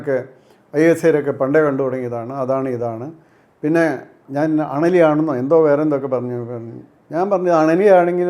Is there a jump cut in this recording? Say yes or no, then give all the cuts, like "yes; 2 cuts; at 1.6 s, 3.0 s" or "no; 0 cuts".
yes; 1 cut; at 4.2 s